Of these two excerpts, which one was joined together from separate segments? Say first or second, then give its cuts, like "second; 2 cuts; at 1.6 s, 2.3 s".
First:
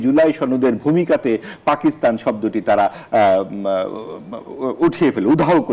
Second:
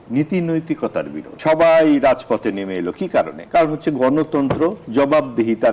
second; 2 cuts; at 1.2 s, 3.4 s